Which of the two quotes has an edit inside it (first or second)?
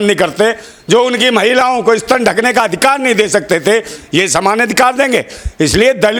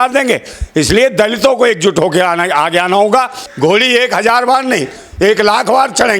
second